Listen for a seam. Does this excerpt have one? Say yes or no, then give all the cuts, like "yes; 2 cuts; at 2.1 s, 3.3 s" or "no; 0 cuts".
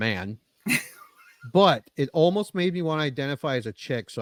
no; 0 cuts